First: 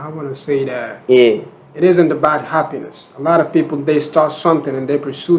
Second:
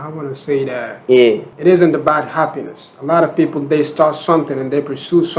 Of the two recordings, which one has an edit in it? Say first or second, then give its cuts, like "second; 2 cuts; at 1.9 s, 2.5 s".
second; 1 cut; at 1.5 s